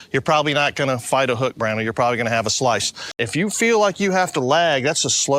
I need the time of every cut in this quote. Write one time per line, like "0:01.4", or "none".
0:03.2